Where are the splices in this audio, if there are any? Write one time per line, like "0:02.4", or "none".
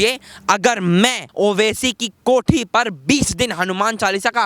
0:01.2